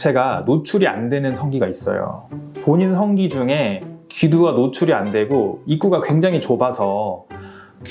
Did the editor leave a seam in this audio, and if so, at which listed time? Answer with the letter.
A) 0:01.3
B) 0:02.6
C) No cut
B